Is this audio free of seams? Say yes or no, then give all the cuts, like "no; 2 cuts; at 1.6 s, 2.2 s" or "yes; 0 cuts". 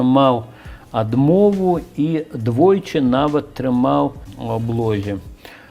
no; 1 cut; at 4.3 s